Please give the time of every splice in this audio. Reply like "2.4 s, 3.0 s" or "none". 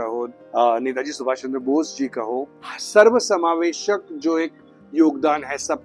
2.5 s